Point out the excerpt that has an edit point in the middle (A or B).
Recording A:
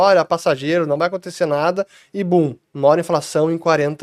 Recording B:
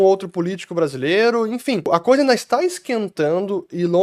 B